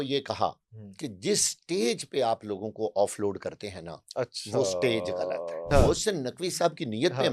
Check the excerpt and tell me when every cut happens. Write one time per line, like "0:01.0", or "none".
0:05.5